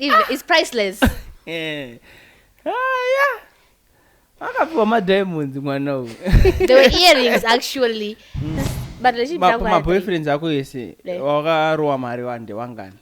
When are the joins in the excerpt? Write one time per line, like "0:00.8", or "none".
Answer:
0:08.7